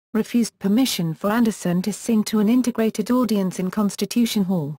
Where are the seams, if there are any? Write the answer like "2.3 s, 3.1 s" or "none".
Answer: 3.1 s